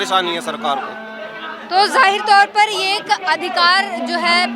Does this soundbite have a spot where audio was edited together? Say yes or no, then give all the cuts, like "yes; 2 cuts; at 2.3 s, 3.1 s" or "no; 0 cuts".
no; 0 cuts